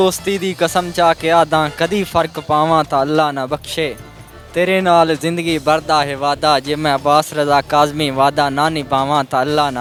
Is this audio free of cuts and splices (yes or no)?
yes